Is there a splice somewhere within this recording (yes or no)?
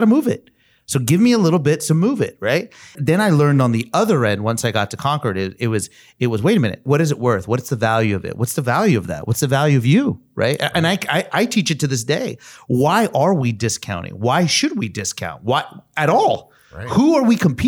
yes